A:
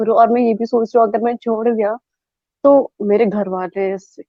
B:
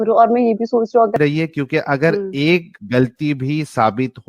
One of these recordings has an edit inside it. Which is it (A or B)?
B